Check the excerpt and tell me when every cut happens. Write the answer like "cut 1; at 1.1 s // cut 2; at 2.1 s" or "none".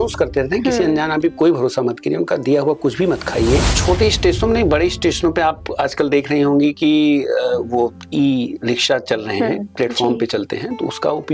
cut 1; at 3.7 s